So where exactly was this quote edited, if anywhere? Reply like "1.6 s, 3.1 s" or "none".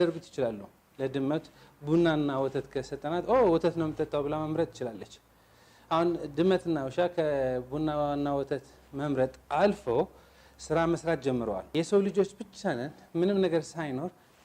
11.6 s